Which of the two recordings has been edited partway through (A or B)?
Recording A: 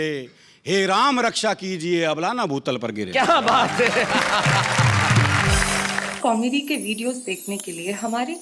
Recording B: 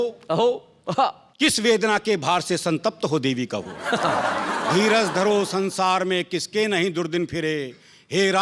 A